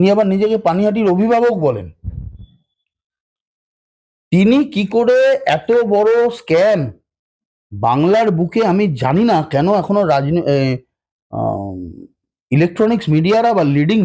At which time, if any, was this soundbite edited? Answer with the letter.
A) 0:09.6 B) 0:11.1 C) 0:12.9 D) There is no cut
D